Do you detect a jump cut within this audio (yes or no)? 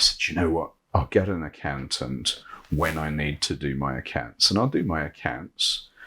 no